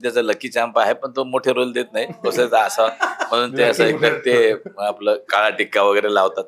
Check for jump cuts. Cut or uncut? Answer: uncut